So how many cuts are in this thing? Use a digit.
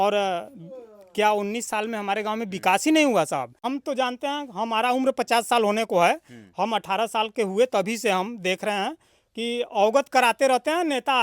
1